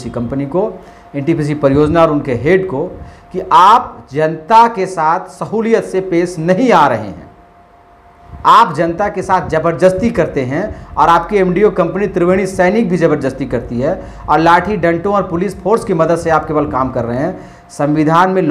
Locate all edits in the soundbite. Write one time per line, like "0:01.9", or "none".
none